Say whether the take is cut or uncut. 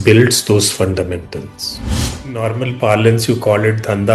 cut